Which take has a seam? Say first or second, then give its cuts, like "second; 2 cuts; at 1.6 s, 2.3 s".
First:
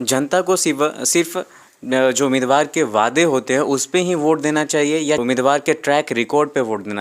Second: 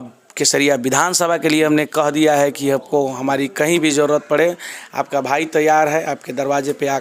first; 1 cut; at 5.2 s